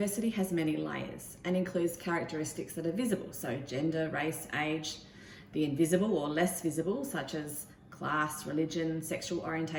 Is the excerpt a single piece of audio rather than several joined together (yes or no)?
yes